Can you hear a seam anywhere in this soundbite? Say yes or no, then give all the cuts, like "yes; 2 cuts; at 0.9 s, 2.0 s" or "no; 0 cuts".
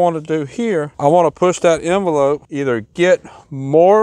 yes; 2 cuts; at 0.9 s, 2.5 s